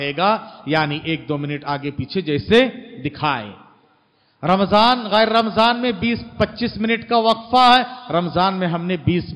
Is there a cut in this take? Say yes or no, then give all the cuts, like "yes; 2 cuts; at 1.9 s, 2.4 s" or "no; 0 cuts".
no; 0 cuts